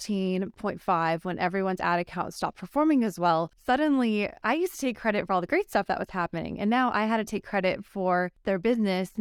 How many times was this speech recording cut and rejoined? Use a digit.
2